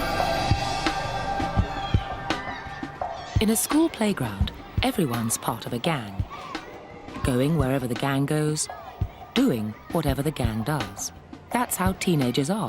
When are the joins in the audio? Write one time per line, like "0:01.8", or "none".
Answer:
0:11.7